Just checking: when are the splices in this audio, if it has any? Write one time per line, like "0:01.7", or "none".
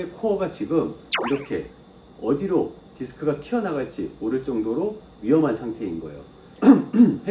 0:01.1
0:06.5